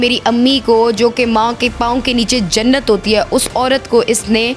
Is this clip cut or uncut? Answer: uncut